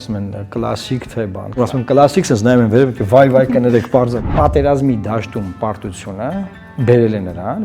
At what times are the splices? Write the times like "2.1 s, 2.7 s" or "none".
1.5 s, 4.3 s, 6.6 s